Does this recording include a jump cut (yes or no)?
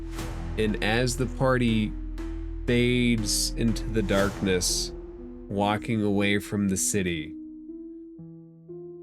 yes